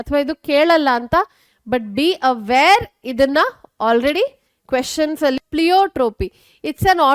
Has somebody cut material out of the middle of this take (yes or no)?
yes